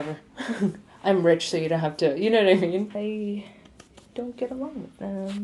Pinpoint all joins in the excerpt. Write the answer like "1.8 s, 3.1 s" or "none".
2.9 s

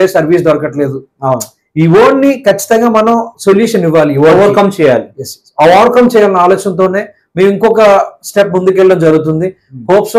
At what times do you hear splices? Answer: none

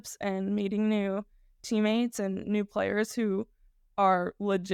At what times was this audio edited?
none

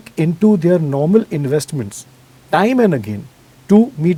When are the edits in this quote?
none

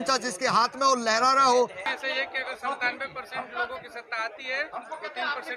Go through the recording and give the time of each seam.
1.8 s

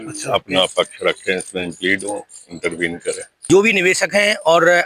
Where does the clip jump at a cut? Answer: 3.6 s

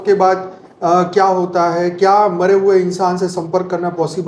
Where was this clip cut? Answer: none

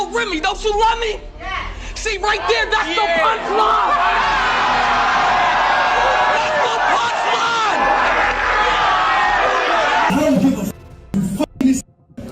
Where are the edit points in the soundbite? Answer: 10.1 s

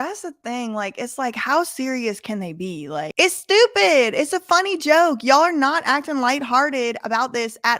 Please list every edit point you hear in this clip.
3.1 s

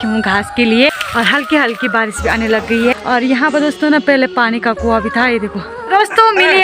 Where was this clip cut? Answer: 1.0 s, 2.9 s, 5.8 s

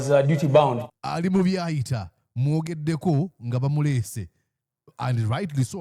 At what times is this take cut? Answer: none

